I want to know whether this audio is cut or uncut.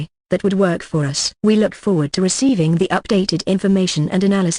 cut